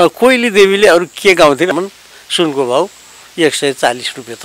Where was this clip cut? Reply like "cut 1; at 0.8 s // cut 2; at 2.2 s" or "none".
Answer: cut 1; at 1.7 s

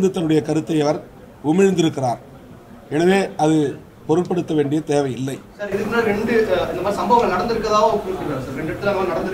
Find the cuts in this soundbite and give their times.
none

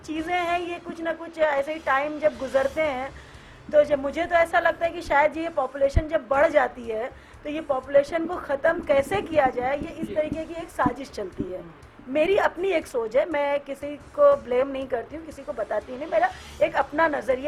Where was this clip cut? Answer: none

